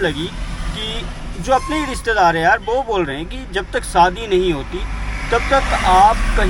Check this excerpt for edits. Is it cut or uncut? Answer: uncut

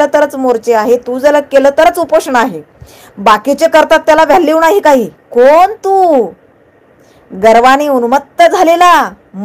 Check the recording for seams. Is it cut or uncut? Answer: uncut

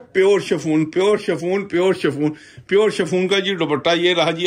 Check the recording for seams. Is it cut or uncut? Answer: uncut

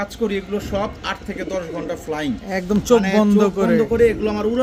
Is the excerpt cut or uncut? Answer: uncut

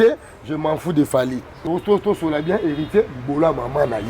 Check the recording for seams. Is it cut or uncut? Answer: cut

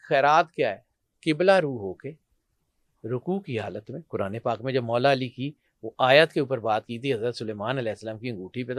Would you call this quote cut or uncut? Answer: uncut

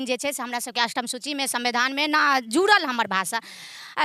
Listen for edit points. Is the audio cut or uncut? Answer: uncut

